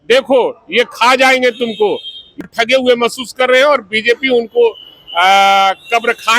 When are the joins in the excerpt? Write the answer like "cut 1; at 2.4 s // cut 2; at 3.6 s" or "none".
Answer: cut 1; at 2.4 s

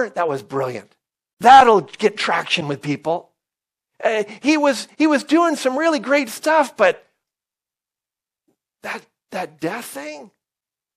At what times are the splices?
cut 1; at 1.2 s

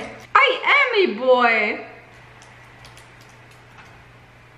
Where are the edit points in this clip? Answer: none

